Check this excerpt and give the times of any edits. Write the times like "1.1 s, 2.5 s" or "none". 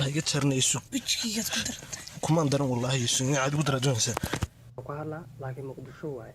4.8 s

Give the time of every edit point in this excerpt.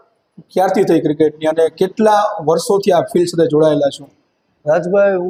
none

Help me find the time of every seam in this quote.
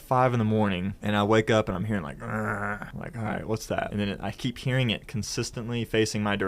0.9 s, 2.9 s, 3.9 s

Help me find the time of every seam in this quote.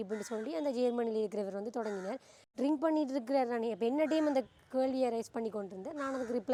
none

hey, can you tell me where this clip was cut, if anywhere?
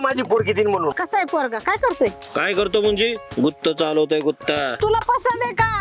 0.9 s, 4.8 s

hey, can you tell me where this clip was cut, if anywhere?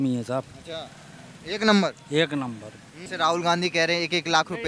3.0 s

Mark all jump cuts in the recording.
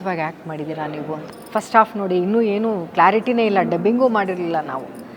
1.3 s

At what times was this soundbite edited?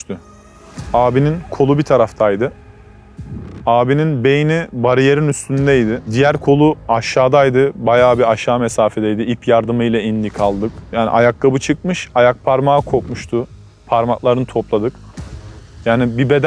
6.0 s, 10.8 s

